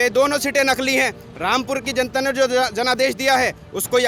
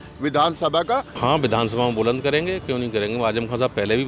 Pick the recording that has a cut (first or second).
second